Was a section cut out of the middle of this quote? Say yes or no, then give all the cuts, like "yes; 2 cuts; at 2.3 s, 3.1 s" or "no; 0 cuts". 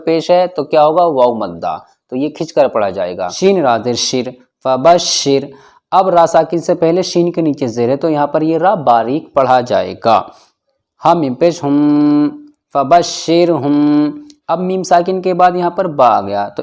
yes; 1 cut; at 3.3 s